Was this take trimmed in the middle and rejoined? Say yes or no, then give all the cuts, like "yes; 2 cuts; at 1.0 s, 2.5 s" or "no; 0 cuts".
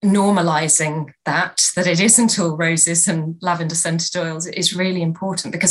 no; 0 cuts